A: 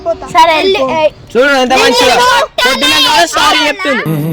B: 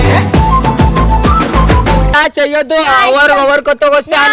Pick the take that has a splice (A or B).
B